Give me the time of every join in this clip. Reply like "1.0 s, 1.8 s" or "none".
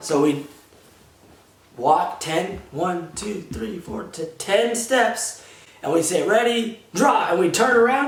none

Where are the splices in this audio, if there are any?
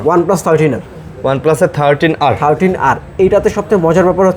none

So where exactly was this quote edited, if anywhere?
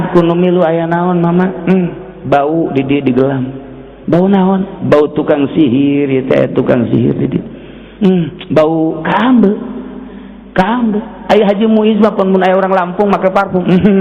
none

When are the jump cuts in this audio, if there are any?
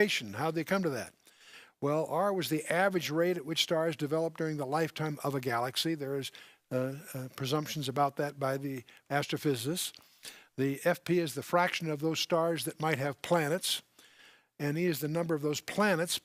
none

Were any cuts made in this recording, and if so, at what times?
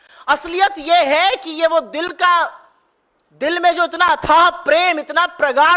none

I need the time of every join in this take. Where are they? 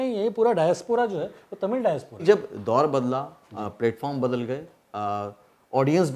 2.2 s

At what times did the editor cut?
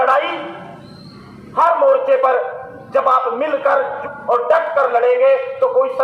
4.0 s

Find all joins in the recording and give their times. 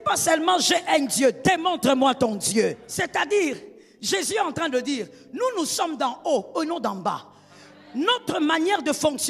2.9 s

